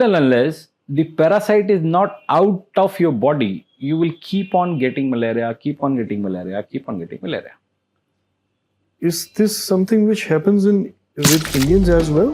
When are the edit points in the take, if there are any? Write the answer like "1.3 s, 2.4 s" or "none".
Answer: none